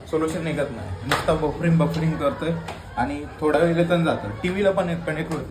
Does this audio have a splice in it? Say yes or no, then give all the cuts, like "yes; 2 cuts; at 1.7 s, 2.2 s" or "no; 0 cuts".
no; 0 cuts